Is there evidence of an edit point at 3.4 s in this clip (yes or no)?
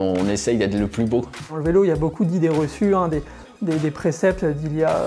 no